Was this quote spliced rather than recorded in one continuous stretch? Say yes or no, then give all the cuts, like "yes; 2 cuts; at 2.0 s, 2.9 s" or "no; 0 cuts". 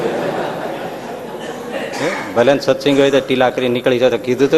no; 0 cuts